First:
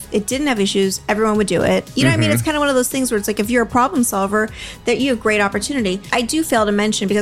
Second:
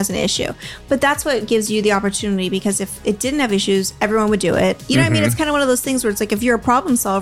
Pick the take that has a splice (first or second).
first